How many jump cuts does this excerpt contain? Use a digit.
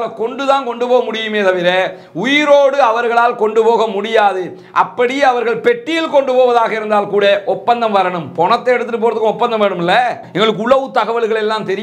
1